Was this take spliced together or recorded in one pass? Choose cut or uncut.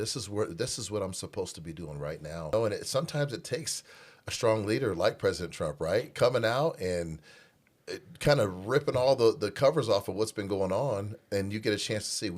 cut